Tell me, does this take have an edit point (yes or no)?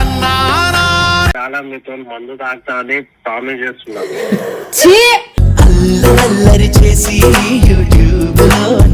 yes